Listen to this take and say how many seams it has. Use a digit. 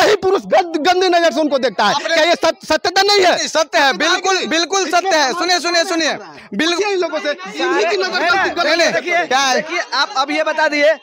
0